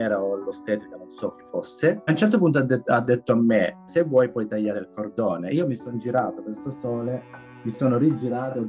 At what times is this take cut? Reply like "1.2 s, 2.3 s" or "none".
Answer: none